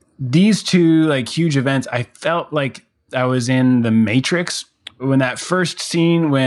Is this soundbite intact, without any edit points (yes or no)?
no